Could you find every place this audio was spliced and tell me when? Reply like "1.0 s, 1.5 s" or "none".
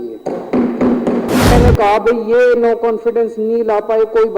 1.5 s